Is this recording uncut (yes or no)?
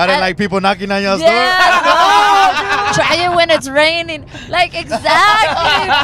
no